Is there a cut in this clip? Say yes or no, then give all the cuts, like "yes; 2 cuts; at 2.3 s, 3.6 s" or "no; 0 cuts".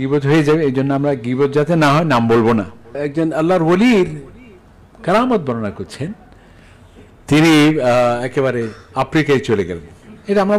yes; 1 cut; at 3.0 s